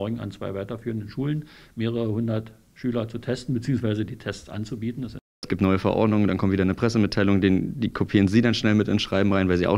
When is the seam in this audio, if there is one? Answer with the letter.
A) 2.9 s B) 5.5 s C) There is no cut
B